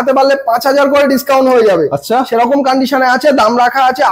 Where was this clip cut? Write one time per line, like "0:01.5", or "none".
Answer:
none